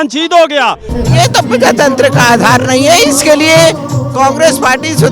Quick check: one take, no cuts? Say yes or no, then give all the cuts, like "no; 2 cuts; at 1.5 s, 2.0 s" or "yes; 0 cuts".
no; 1 cut; at 0.9 s